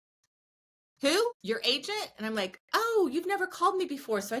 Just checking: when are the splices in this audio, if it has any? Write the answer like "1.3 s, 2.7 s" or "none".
1.4 s

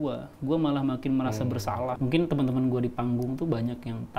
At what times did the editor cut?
2.0 s

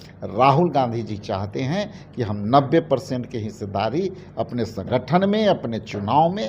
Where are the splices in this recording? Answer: none

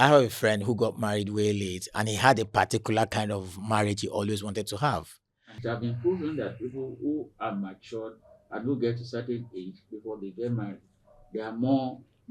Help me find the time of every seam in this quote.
5.6 s

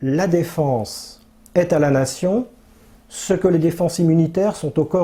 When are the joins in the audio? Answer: none

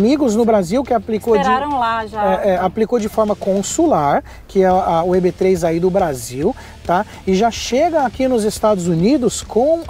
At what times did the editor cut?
none

